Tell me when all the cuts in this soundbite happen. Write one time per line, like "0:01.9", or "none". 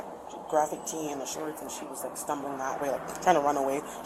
none